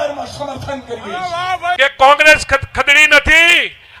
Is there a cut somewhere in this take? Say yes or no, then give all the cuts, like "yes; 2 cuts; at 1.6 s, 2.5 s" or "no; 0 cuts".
yes; 1 cut; at 1.8 s